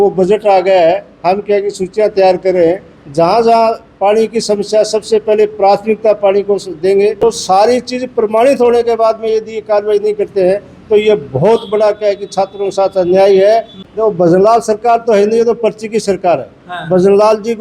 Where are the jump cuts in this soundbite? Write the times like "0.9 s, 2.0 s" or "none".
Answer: 7.2 s, 13.8 s